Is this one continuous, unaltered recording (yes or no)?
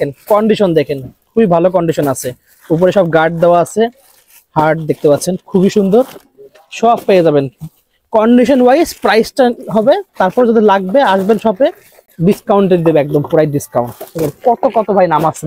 yes